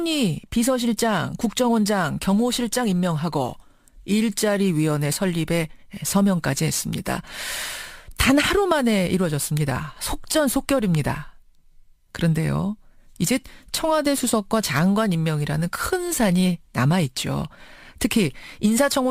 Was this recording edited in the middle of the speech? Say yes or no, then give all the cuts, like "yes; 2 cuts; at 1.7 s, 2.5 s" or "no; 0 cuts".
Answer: no; 0 cuts